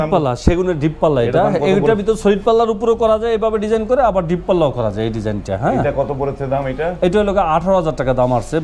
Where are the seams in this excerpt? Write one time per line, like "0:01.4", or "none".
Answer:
none